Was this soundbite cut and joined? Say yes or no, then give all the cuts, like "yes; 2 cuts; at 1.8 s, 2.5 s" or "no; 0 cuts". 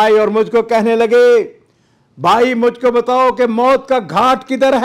no; 0 cuts